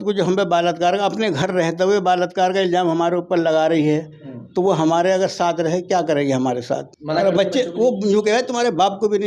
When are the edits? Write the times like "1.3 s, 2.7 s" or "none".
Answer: 6.9 s